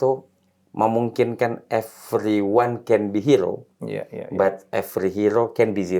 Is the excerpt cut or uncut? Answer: uncut